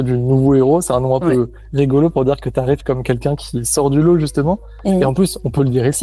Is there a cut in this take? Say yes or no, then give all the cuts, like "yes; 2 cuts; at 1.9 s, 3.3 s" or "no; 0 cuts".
no; 0 cuts